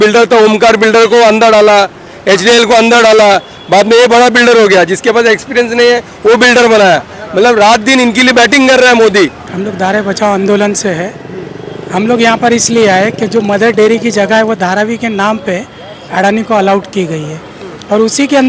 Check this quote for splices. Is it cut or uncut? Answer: cut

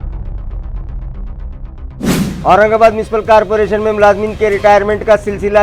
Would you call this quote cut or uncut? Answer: uncut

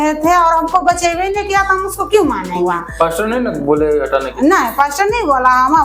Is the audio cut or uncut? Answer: cut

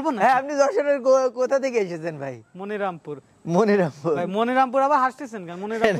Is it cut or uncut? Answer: uncut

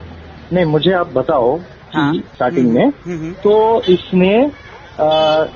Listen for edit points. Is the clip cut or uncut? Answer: cut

